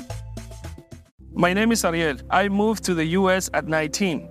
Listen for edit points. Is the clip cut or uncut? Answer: cut